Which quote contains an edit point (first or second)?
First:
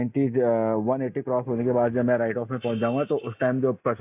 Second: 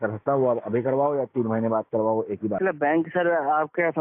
second